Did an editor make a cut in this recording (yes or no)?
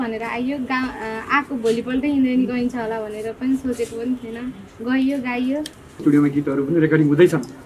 yes